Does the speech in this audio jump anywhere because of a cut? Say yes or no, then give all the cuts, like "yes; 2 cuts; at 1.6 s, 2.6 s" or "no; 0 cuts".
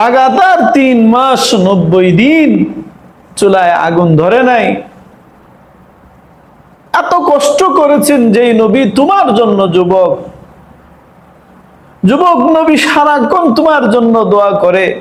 no; 0 cuts